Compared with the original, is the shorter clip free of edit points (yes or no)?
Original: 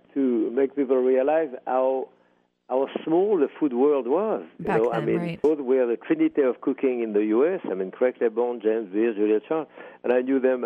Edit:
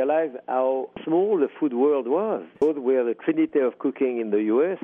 no